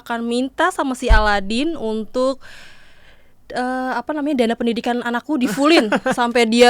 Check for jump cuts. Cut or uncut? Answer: uncut